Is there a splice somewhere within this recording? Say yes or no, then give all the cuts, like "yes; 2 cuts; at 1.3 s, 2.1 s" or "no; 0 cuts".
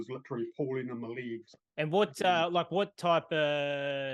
yes; 1 cut; at 1.6 s